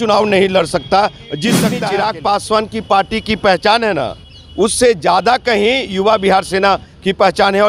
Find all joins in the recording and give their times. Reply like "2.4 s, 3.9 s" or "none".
1.7 s